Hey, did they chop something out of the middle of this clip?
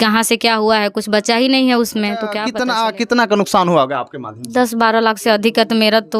yes; 1 cut; at 2.4 s

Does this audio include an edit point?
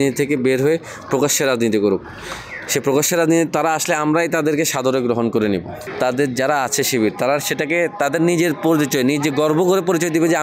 yes; 1 cut; at 5.9 s

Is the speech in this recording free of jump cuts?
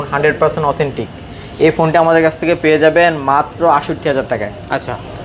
yes; 0 cuts

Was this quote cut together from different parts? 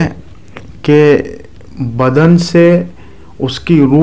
no; 0 cuts

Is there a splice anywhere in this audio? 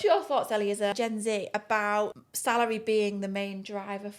yes; 2 cuts; at 0.9 s, 2.3 s

